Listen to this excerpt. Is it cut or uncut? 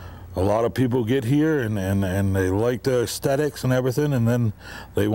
uncut